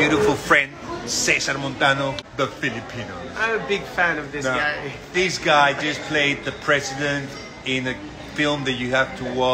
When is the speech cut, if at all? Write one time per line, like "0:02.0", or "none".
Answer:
0:02.2

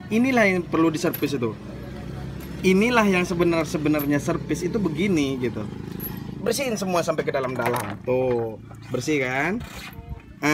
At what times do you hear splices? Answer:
none

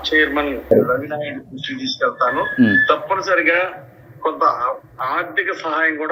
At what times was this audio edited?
none

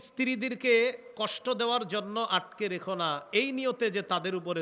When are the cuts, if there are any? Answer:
none

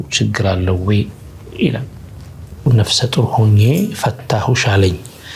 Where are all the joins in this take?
0:02.7

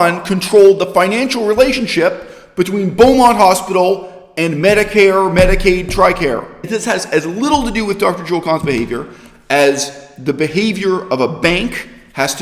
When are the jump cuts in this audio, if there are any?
0:06.6

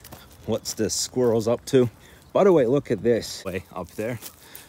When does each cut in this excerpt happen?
0:03.4

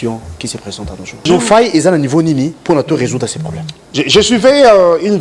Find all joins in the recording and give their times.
0:01.2

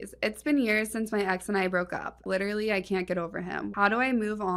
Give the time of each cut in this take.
0:02.2
0:03.7

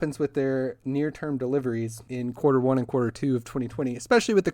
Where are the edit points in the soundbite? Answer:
0:02.0

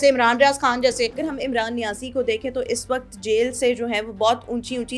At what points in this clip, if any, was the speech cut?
0:01.3

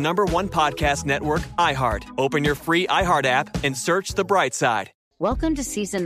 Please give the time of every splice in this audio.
0:04.9

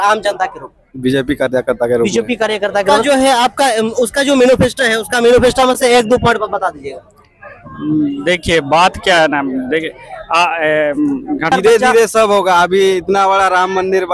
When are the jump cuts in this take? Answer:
0:02.9
0:11.5

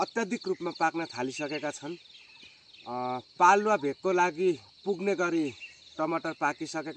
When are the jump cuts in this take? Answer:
none

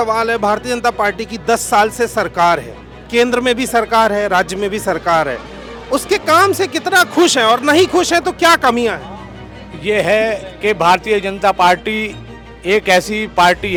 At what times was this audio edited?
none

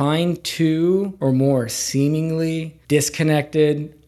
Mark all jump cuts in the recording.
0:01.1
0:02.7

